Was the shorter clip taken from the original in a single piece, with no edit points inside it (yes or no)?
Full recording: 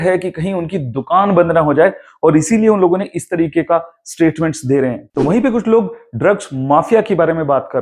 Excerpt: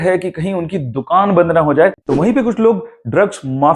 no